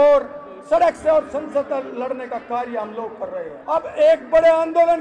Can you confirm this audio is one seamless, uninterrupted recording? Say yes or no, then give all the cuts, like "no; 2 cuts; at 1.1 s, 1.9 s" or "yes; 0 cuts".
no; 1 cut; at 3.5 s